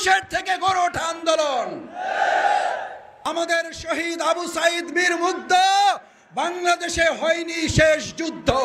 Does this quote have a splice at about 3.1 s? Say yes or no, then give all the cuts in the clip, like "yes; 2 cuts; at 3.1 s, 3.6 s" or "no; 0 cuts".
yes; 1 cut; at 3.1 s